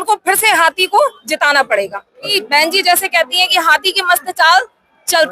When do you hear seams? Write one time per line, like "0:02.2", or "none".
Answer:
0:02.3